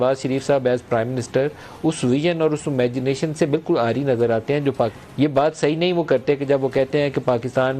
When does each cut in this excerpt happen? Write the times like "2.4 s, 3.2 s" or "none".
5.0 s